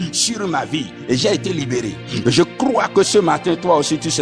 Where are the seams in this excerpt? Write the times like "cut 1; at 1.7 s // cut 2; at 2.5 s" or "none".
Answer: cut 1; at 0.9 s // cut 2; at 2.0 s